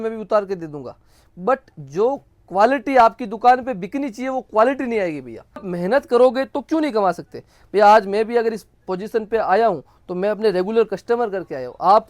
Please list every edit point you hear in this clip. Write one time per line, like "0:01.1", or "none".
0:05.7